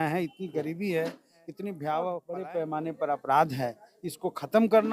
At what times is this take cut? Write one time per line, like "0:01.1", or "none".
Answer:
0:02.3